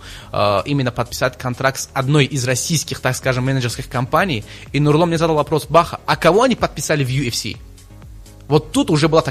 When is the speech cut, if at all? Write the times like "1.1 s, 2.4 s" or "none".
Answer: none